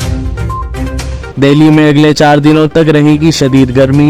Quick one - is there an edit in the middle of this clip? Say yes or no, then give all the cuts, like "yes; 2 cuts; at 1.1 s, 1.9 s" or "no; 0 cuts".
yes; 1 cut; at 1.2 s